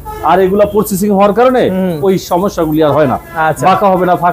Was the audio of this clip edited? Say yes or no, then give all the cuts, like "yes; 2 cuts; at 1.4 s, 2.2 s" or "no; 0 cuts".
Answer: no; 0 cuts